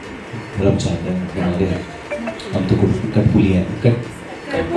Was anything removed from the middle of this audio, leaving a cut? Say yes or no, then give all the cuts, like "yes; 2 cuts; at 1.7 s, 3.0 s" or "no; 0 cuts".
no; 0 cuts